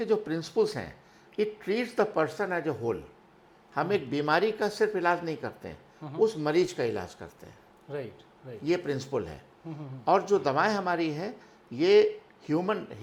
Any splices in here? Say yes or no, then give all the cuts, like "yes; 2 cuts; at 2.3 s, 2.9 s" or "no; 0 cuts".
no; 0 cuts